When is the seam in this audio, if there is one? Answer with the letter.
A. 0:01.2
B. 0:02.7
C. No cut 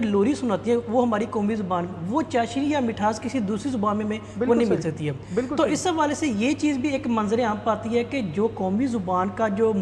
C